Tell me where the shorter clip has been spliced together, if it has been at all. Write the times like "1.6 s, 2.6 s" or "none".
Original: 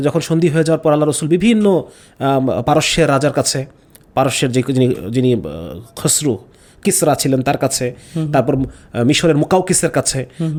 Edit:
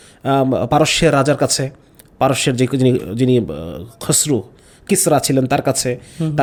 none